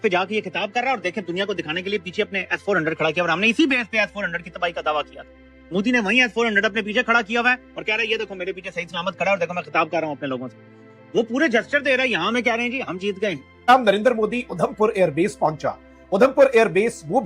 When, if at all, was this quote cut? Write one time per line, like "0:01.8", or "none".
0:13.5